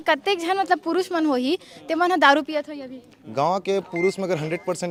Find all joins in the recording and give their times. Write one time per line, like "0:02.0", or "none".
none